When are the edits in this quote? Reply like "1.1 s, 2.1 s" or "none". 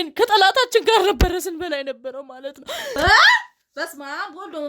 3.0 s